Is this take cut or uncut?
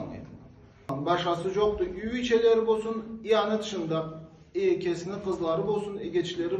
cut